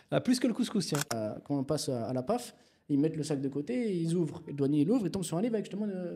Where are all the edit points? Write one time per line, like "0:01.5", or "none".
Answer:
0:01.1